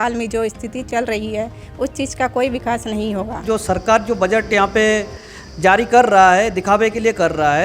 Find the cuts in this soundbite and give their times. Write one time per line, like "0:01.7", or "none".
0:03.4